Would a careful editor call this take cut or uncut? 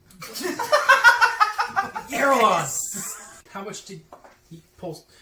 cut